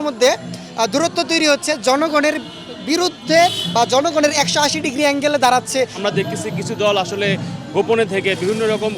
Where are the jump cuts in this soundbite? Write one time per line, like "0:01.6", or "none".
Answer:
0:06.0